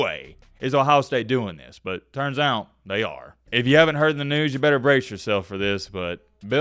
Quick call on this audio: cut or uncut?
uncut